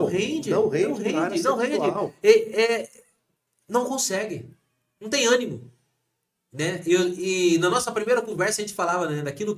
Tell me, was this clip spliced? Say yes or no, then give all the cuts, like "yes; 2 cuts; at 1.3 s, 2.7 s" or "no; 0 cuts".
no; 0 cuts